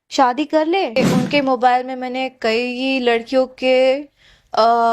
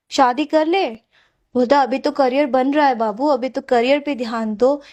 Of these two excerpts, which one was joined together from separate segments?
first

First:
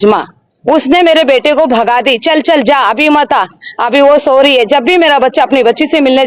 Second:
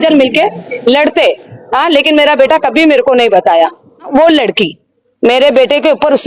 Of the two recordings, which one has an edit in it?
second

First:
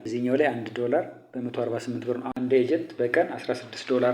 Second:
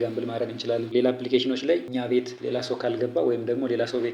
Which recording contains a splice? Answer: first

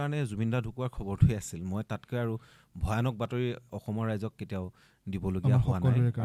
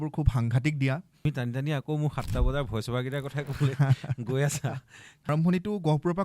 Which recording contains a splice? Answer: second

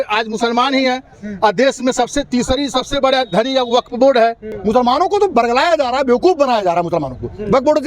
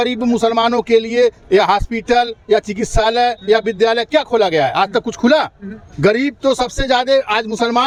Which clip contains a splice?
first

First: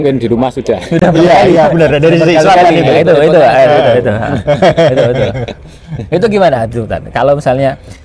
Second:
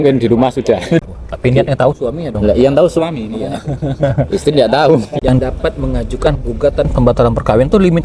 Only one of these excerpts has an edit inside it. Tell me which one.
second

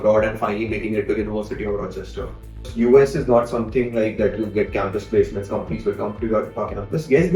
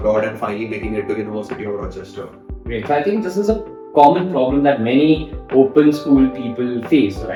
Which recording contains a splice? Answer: first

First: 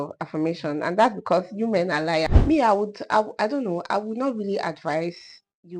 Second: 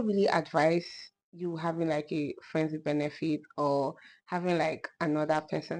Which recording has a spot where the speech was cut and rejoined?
first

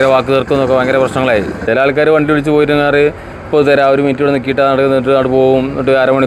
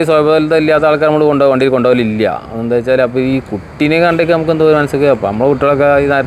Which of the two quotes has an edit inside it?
first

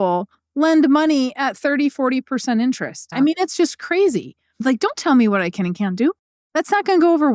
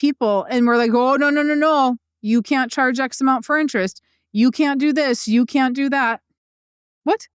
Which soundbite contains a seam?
first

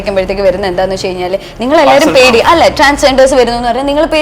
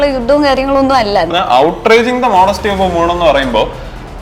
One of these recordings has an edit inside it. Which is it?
second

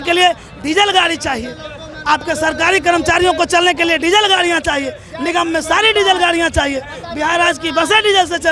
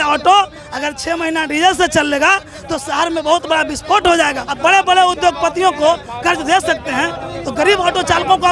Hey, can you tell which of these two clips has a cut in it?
second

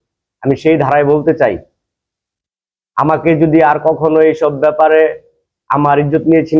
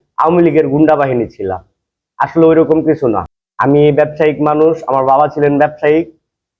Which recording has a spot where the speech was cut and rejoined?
second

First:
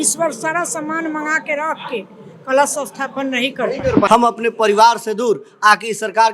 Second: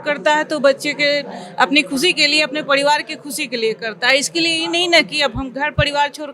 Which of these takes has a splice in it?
first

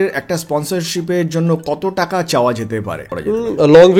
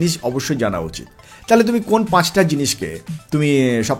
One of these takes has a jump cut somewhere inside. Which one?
first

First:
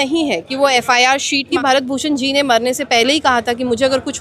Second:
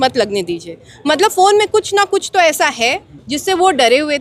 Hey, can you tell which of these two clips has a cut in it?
first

